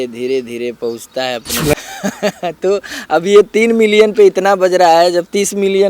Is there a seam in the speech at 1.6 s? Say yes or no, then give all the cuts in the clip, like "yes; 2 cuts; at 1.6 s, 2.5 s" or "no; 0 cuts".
yes; 1 cut; at 1.6 s